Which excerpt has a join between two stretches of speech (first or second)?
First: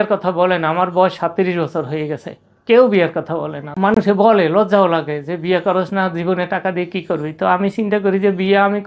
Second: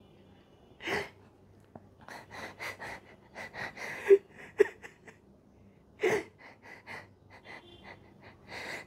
first